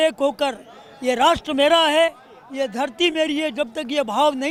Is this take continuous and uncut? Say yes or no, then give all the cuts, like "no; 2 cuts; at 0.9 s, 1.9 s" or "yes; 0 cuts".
yes; 0 cuts